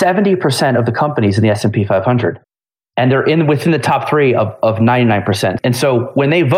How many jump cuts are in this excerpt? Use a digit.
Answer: 1